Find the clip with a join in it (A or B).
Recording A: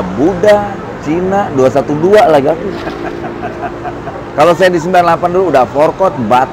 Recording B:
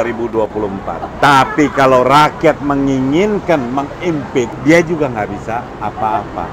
B